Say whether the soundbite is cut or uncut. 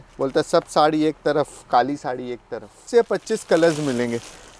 cut